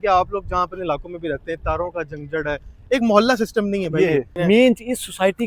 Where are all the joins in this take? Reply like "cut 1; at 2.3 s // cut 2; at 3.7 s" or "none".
cut 1; at 4.3 s